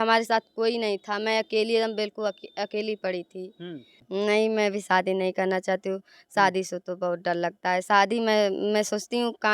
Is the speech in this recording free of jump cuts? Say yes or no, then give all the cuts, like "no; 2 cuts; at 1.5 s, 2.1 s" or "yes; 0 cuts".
no; 1 cut; at 3.9 s